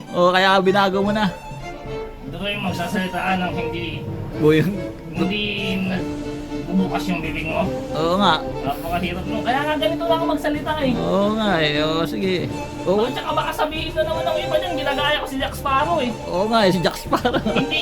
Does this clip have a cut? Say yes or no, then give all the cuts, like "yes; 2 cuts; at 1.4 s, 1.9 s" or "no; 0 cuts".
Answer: no; 0 cuts